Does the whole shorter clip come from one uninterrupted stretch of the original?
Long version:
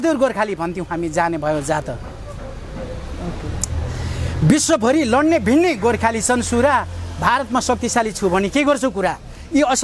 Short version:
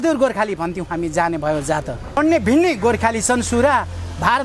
no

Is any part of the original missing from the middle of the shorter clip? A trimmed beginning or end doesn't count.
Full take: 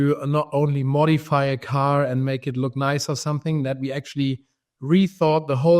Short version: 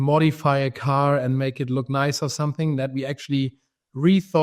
no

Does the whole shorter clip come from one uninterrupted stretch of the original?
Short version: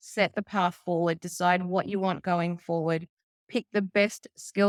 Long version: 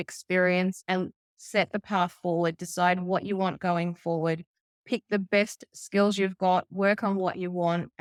yes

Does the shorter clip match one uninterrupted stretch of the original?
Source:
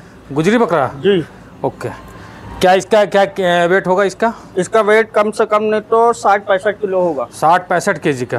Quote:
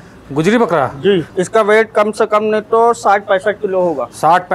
no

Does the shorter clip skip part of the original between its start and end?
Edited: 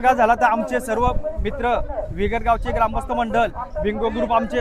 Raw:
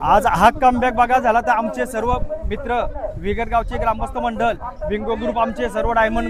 no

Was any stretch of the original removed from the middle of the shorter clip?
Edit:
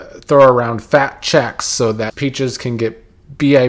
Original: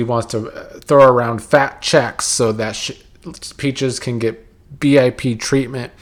yes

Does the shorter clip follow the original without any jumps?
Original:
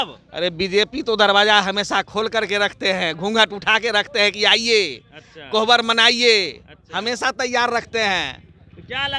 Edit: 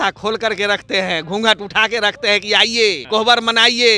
no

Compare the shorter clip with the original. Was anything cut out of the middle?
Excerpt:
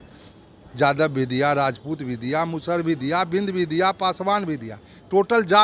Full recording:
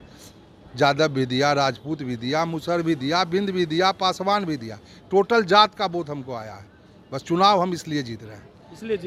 no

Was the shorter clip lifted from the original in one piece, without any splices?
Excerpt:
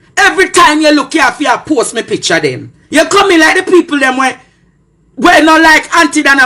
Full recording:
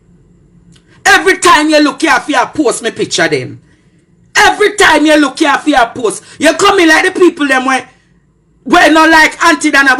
no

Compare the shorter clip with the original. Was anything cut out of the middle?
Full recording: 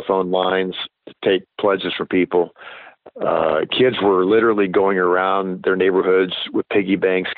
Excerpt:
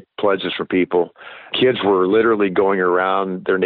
yes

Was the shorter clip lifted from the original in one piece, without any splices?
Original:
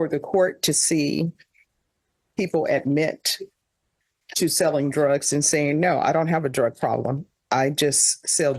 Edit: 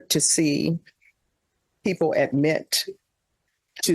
yes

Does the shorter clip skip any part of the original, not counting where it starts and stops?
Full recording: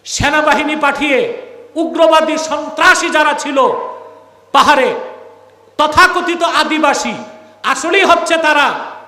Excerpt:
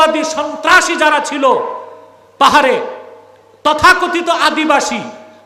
no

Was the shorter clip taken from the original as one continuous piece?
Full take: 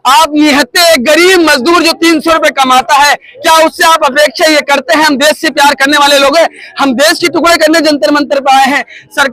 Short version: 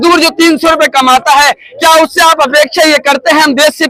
yes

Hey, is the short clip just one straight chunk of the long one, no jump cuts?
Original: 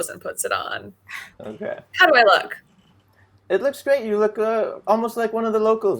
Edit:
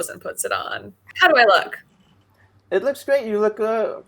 no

